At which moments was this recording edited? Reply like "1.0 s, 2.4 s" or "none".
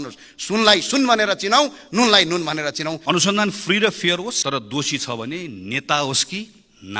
3.0 s, 4.4 s

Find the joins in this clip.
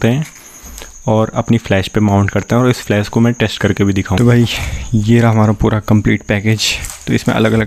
4.2 s

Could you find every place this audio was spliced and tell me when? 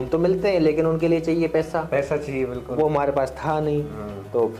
none

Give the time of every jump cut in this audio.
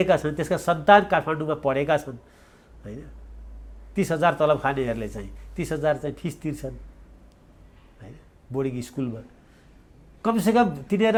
none

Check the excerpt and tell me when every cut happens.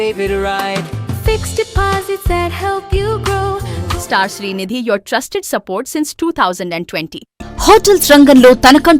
3.8 s, 7.3 s

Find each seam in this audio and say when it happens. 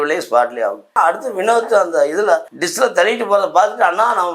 1.0 s, 2.6 s

